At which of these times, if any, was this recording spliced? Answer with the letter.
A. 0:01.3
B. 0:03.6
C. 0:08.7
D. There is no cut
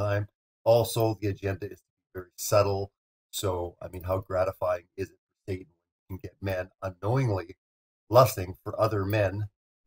C